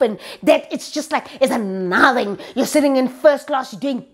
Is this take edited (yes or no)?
no